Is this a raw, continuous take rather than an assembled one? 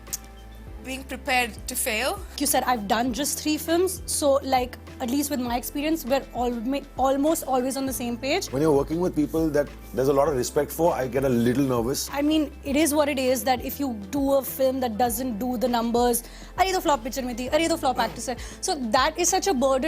no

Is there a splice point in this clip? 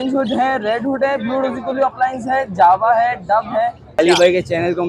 yes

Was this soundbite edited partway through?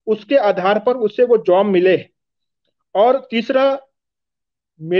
no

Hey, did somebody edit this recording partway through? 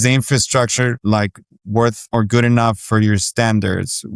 yes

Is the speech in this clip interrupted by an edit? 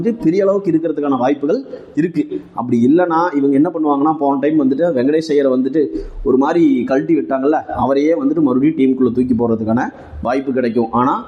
no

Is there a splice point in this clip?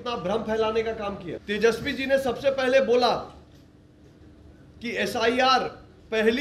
yes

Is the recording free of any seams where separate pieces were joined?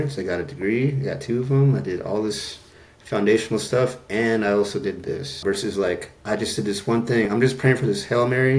no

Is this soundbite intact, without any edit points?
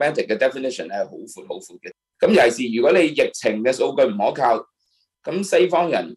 no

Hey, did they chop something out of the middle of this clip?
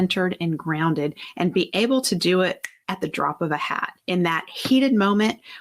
yes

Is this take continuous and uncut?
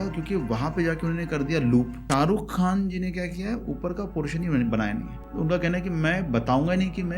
no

